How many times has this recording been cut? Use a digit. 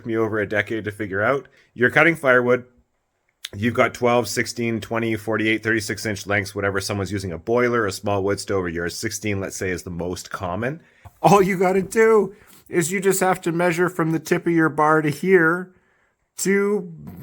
2